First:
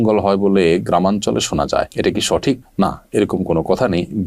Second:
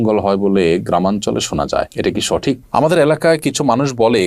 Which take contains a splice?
second; 1 cut; at 2.6 s

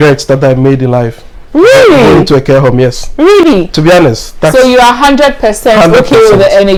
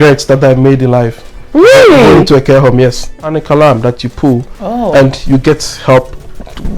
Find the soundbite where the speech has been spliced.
second; 1 cut; at 3.1 s

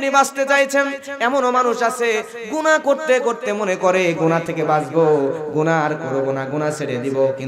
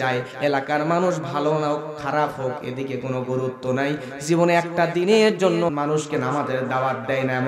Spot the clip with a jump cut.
second; 1 cut; at 5.7 s

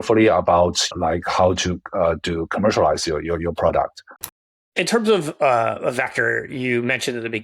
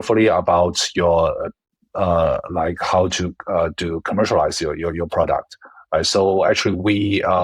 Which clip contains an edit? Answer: first; 2 cuts; at 0.9 s, 4.2 s

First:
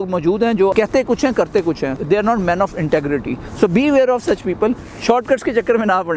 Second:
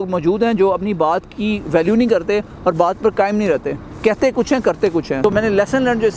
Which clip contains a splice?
first; 4 cuts; at 0.7 s, 1.9 s, 3.4 s, 4.9 s

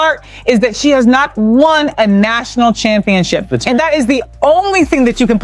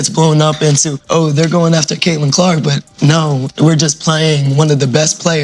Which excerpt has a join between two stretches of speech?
second; 1 cut; at 0.9 s

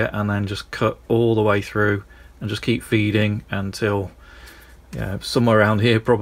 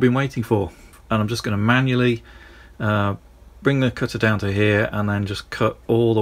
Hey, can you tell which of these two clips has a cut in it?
second; 1 cut; at 0.9 s

